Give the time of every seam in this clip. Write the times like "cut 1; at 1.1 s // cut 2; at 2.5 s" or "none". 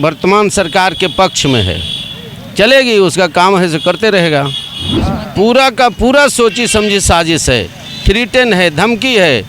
cut 1; at 4.9 s